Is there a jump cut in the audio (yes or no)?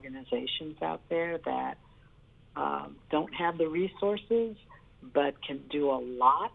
no